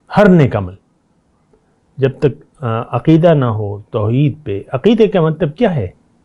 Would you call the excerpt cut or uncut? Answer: uncut